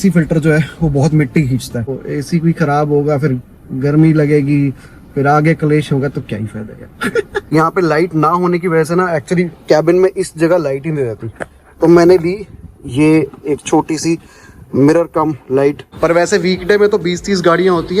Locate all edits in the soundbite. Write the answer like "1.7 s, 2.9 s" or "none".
2.0 s, 7.4 s, 15.9 s